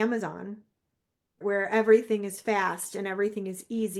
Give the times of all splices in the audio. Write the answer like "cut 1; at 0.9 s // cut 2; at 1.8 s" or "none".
cut 1; at 1.3 s

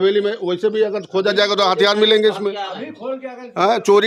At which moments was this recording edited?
none

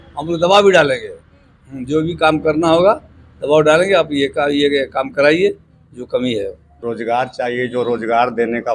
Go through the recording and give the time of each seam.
cut 1; at 6.7 s

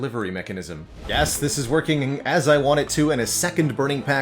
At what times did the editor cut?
cut 1; at 0.9 s

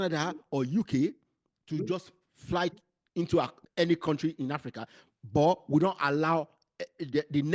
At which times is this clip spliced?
cut 1; at 3.6 s

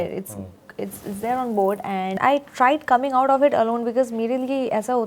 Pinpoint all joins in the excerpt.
cut 1; at 2.2 s

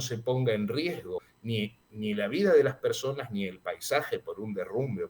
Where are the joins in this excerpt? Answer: cut 1; at 1.3 s

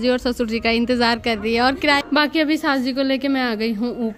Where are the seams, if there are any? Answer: cut 1; at 2.0 s

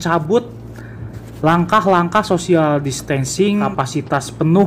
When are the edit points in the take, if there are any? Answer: cut 1; at 3.7 s

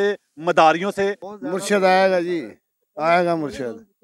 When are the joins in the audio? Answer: cut 1; at 1.3 s

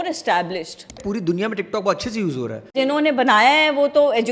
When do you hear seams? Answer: cut 1; at 0.9 s // cut 2; at 2.8 s

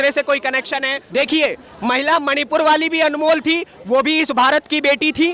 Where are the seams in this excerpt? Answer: cut 1; at 1.0 s

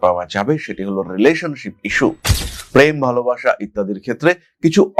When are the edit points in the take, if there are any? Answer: none

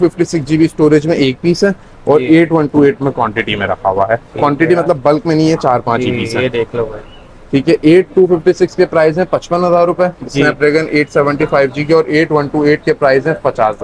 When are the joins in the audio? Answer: none

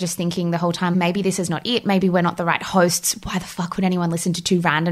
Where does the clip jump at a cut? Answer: cut 1; at 0.9 s

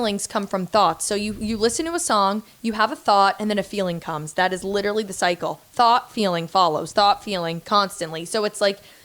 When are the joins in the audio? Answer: none

